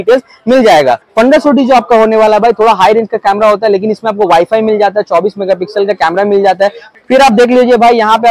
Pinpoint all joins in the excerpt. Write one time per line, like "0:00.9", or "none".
0:01.1
0:06.8